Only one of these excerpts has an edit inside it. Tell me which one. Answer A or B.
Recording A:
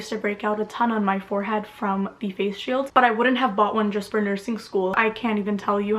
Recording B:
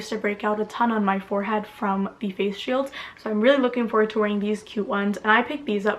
A